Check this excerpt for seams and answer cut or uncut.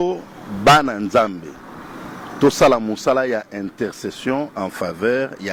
uncut